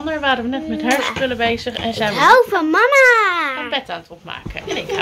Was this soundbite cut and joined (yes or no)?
no